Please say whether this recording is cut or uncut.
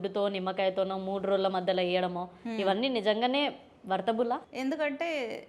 cut